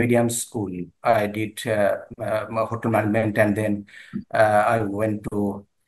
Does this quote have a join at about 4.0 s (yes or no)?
no